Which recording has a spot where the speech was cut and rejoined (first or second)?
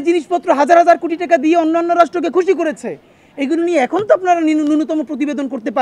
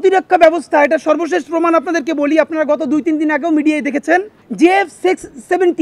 second